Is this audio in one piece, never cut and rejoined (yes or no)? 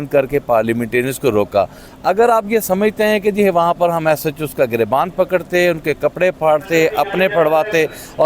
yes